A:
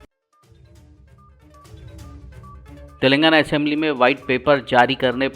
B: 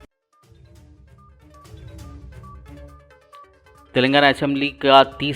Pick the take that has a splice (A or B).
B